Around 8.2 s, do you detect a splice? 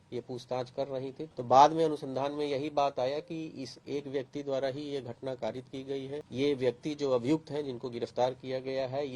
no; 2 cuts; at 1.2 s, 6.2 s

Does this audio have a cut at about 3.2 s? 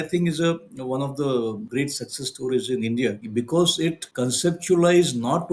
yes; 3 cuts; at 1.6 s, 3.2 s, 4.0 s

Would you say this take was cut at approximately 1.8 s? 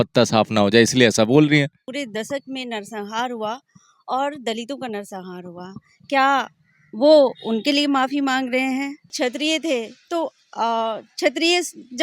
yes; 2 cuts; at 1.8 s, 9.1 s

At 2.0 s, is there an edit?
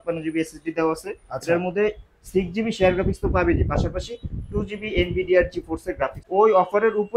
no; 1 cut; at 6.2 s

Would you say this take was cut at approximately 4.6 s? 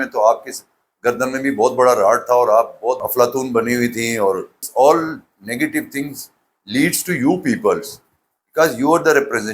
yes; 2 cuts; at 3.0 s, 4.6 s

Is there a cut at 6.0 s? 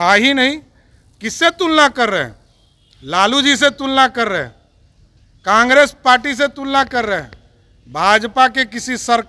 no; 0 cuts

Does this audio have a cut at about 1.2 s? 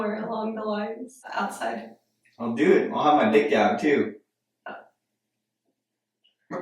yes; 1 cut; at 1.2 s

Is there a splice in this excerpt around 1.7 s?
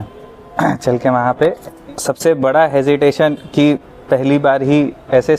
yes; 1 cut; at 1.7 s

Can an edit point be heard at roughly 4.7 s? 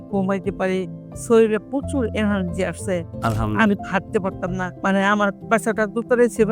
yes; 1 cut; at 4.7 s

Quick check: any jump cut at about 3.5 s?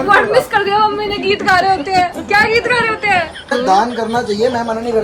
yes; 1 cut; at 3.5 s

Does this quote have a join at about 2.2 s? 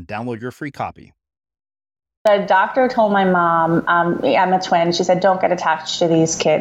yes; 1 cut; at 2.2 s

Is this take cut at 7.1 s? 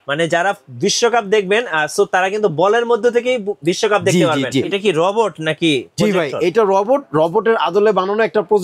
no; 1 cut; at 4.7 s

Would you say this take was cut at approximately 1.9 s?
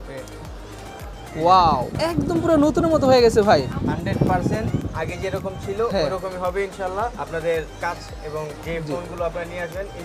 yes; 3 cuts; at 1.9 s, 7.2 s, 8.6 s

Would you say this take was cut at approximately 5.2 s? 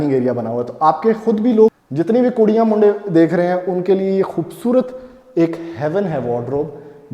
no; 1 cut; at 1.8 s

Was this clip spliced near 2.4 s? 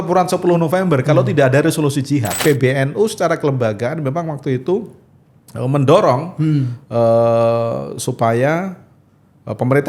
yes; 1 cut; at 2.4 s

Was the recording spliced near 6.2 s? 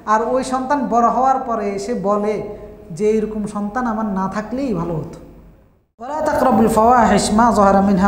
yes; 1 cut; at 6.2 s

